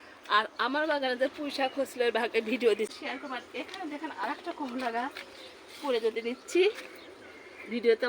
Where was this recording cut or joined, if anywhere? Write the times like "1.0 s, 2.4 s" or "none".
2.9 s